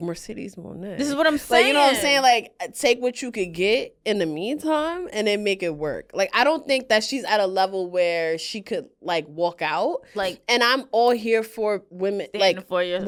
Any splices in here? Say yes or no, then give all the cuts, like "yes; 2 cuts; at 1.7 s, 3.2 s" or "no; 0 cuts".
no; 0 cuts